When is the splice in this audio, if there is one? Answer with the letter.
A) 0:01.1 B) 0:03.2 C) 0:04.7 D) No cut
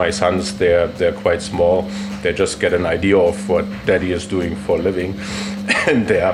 D